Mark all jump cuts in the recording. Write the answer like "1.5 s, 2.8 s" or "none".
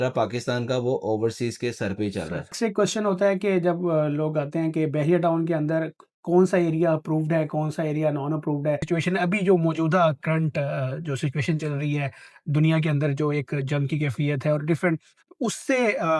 2.6 s, 8.9 s